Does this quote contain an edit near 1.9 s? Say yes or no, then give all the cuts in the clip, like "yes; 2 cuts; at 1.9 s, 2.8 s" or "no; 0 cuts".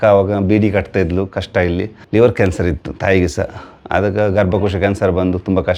yes; 1 cut; at 1.9 s